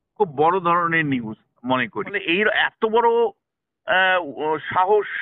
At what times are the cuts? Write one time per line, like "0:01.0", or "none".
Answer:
0:02.2